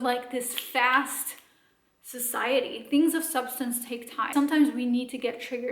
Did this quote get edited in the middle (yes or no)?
yes